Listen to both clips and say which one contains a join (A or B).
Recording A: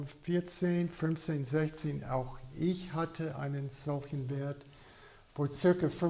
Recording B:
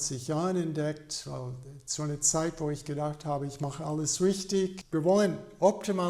B